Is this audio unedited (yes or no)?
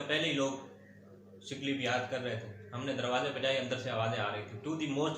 yes